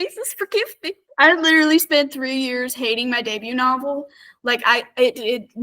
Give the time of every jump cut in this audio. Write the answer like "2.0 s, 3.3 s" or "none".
1.0 s